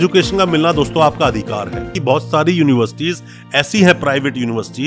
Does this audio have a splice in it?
yes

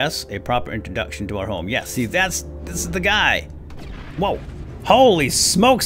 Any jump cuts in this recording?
no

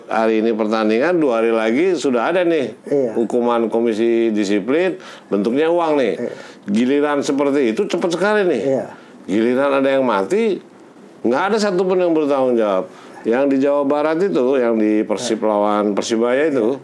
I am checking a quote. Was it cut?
no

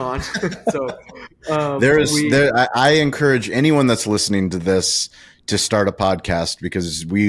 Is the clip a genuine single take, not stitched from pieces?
yes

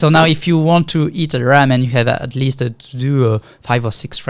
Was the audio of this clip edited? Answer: no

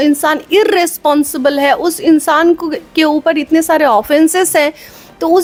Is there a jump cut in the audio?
no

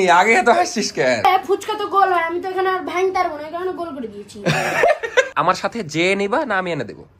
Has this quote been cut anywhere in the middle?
yes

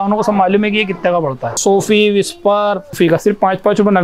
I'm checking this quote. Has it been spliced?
yes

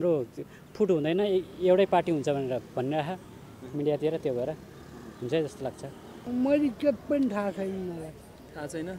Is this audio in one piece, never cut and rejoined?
yes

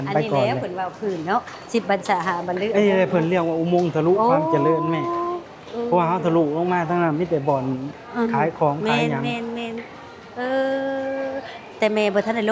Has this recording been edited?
no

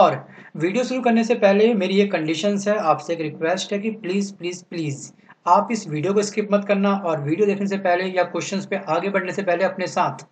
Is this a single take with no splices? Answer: yes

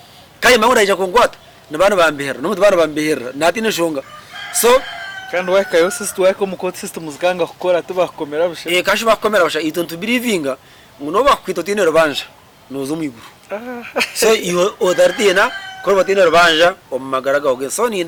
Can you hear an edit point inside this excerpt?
no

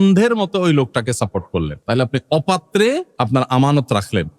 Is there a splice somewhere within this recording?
yes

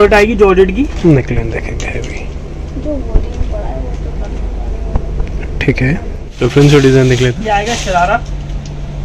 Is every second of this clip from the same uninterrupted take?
no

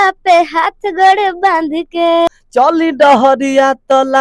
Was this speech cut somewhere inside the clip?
yes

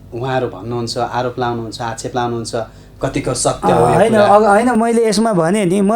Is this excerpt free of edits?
yes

